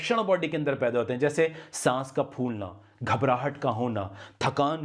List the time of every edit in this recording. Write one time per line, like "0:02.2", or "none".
none